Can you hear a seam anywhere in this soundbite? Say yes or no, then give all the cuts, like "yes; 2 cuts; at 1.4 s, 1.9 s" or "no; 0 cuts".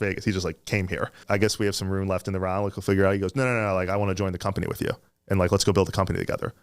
yes; 1 cut; at 1.2 s